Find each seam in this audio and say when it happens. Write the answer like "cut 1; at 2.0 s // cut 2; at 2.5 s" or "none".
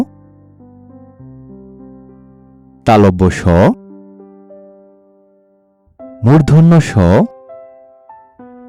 none